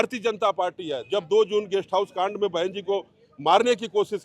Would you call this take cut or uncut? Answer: uncut